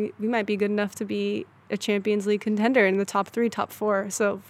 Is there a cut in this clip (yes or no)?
no